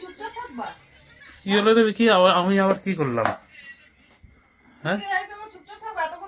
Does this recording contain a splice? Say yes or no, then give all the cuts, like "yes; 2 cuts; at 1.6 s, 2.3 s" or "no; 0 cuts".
no; 0 cuts